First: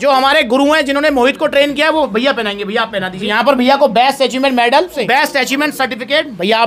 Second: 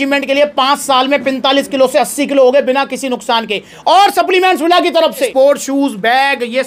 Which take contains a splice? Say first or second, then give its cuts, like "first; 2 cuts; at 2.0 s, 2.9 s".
first; 1 cut; at 5.0 s